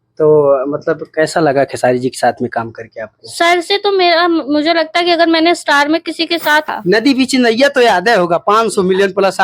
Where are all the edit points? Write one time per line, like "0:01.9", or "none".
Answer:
0:06.7